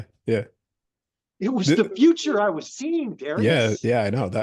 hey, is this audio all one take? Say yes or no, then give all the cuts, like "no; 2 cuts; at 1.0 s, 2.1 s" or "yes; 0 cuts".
yes; 0 cuts